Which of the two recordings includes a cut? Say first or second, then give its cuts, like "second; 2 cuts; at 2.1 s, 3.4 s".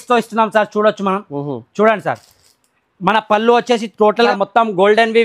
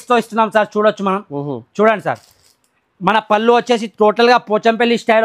first; 1 cut; at 4.3 s